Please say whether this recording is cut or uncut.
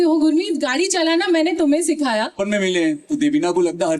cut